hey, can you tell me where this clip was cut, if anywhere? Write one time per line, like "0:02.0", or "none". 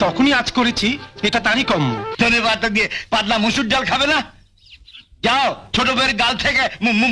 0:02.1